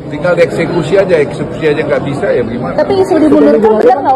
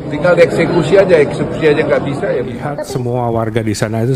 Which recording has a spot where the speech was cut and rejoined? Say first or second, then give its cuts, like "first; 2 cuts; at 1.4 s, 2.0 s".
second; 1 cut; at 2.6 s